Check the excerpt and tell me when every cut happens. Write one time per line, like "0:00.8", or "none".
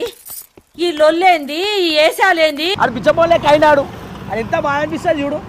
0:02.7